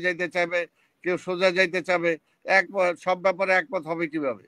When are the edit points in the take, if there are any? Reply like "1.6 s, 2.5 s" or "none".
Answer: none